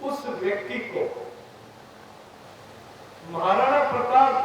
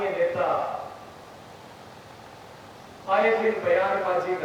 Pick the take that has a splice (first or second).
first